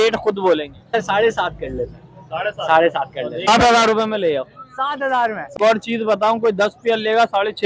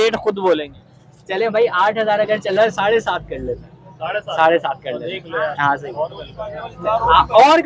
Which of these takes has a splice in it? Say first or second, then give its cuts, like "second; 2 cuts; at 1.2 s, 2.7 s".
first; 3 cuts; at 1.0 s, 3.5 s, 5.4 s